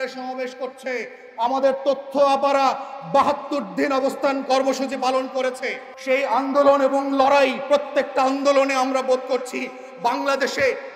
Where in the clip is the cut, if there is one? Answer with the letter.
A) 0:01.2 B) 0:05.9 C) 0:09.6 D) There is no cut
B